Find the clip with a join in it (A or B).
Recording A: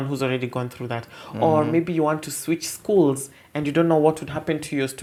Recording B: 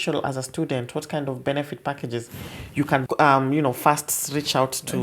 B